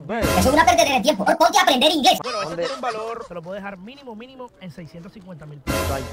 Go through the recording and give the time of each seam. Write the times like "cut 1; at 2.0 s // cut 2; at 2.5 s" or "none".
cut 1; at 2.2 s